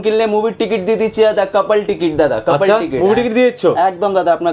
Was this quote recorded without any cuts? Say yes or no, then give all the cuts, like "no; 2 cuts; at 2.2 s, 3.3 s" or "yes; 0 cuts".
yes; 0 cuts